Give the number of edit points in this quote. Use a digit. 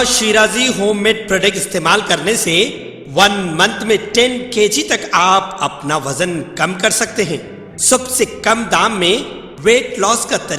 0